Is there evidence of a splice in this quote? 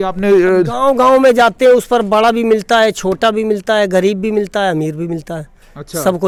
no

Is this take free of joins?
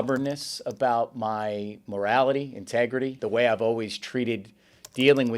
no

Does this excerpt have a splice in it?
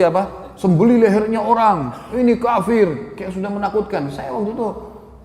no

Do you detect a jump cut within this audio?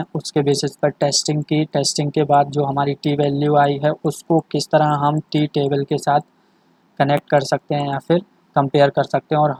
no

